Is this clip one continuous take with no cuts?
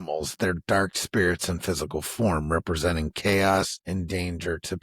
no; 1 cut; at 3.8 s

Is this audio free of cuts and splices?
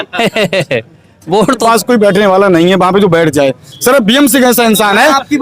no; 1 cut; at 1.6 s

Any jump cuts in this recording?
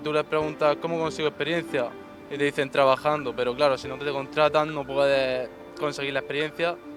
no; 0 cuts

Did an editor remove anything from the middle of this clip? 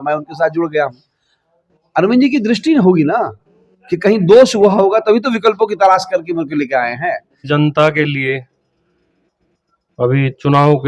yes; 1 cut; at 7.4 s

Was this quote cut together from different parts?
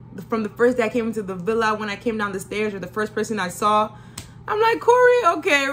no; 0 cuts

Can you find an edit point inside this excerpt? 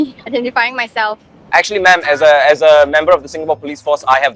yes; 1 cut; at 1.3 s

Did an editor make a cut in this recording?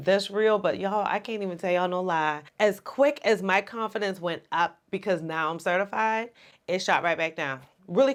no; 0 cuts

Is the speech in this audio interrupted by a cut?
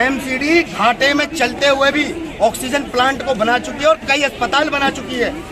no; 0 cuts

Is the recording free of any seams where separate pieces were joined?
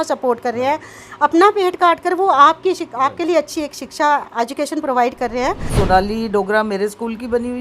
no; 1 cut; at 5.7 s

